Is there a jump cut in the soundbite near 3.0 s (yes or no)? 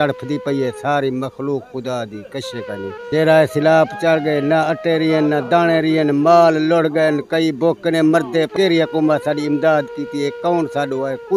yes